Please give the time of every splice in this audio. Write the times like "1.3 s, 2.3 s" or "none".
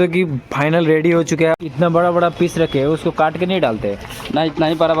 1.6 s